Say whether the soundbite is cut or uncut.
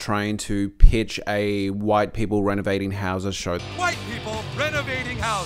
uncut